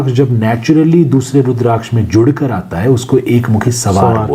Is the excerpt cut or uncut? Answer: uncut